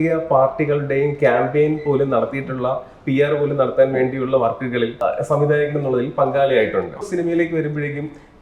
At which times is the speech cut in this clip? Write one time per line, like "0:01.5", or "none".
0:05.0
0:07.1